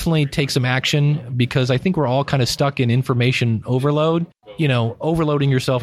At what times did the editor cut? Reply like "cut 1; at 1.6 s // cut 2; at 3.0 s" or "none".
cut 1; at 4.4 s